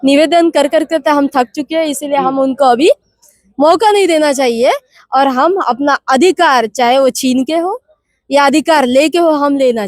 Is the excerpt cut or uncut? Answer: uncut